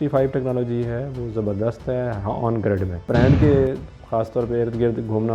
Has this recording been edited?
yes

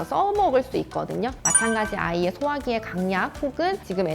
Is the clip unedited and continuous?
no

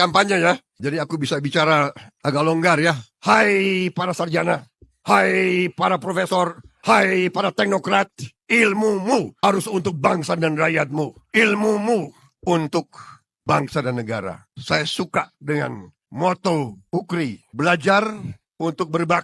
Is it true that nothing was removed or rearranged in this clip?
no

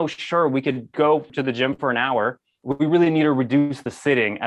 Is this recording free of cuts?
no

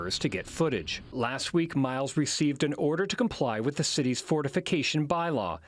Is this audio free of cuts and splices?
no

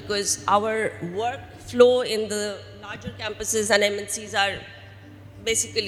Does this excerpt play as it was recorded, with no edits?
yes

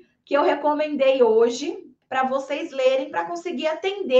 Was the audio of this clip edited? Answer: yes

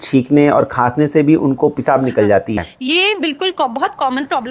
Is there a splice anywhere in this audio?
yes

